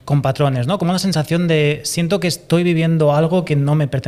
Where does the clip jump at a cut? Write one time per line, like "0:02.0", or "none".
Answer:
none